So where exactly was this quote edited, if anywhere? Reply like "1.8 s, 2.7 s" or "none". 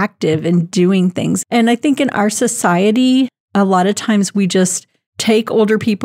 1.4 s